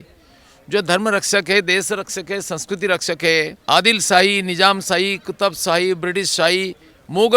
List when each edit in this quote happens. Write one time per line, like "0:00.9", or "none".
0:03.6